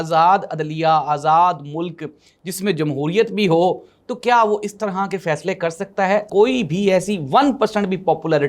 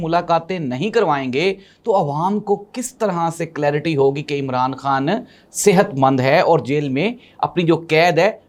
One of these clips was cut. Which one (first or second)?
first